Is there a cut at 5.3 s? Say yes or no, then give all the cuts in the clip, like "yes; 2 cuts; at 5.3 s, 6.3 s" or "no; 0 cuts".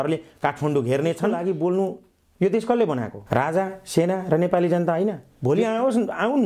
yes; 3 cuts; at 1.4 s, 3.2 s, 5.3 s